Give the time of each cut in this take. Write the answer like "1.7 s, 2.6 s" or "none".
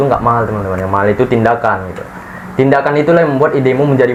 none